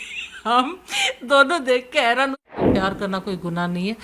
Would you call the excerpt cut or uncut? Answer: cut